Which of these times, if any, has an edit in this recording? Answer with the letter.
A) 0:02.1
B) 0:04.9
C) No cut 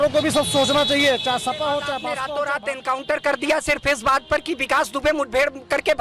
A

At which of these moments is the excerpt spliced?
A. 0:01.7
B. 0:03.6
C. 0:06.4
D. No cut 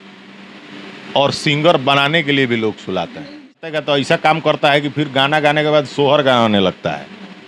B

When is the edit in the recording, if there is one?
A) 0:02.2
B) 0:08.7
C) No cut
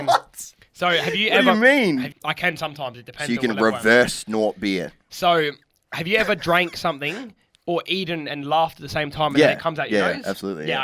A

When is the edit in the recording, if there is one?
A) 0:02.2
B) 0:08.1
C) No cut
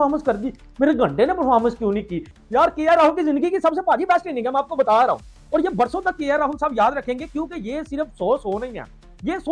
A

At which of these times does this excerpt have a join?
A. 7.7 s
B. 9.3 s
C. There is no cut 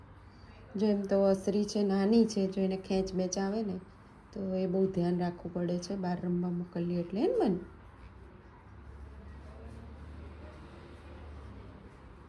C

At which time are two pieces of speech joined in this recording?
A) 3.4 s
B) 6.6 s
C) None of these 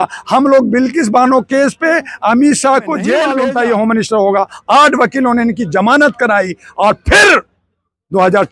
A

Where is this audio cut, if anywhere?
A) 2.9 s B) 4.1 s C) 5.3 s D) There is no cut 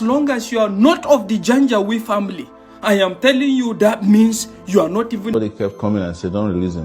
C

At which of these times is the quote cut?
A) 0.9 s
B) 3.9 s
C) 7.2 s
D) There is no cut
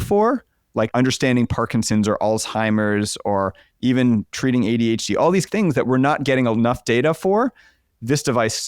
A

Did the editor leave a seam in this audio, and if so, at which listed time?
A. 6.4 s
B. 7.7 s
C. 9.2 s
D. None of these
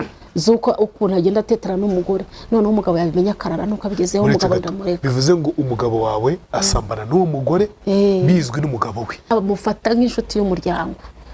C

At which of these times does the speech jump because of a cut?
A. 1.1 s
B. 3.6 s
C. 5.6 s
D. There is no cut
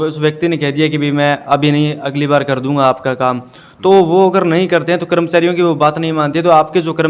D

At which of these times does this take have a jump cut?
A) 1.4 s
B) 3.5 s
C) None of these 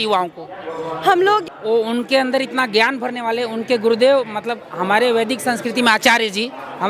A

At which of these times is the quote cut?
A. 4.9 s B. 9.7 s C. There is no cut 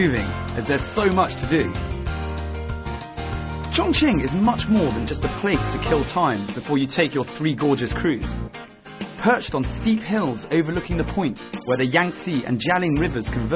B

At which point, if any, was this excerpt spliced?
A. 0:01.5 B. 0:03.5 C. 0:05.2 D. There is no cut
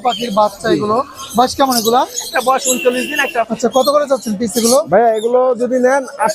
B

